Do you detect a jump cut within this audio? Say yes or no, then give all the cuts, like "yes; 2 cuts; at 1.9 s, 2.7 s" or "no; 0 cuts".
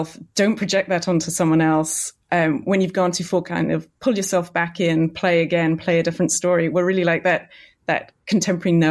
no; 0 cuts